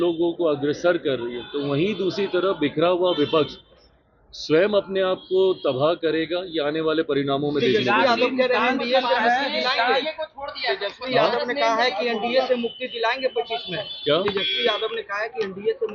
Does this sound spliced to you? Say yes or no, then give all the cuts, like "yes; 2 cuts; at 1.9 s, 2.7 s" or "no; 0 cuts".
no; 0 cuts